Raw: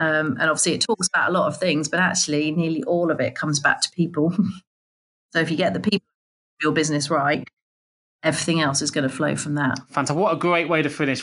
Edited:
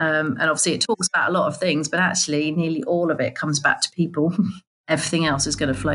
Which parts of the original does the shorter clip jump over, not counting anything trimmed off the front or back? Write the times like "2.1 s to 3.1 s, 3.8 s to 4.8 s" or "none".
4.7 s to 8.0 s